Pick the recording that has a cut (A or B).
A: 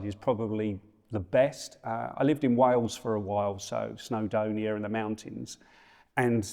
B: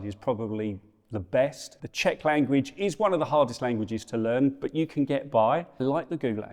B